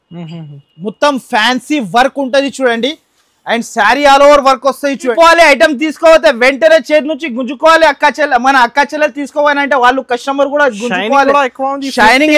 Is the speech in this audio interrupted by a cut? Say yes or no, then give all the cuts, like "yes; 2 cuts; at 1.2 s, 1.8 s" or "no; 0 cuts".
yes; 1 cut; at 5.1 s